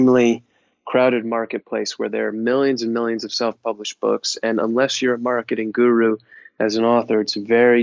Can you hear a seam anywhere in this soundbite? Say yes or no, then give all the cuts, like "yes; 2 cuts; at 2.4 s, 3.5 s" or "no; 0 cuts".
no; 0 cuts